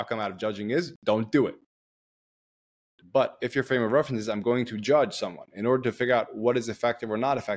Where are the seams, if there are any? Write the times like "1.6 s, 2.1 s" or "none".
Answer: none